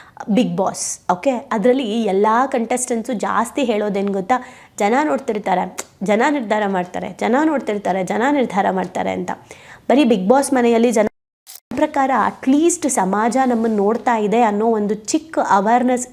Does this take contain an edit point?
yes; 1 cut; at 11.7 s

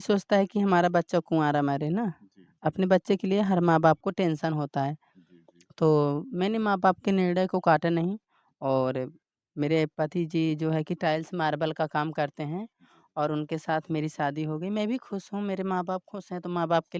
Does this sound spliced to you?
no; 0 cuts

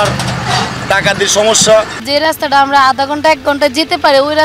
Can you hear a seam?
yes; 1 cut; at 2.0 s

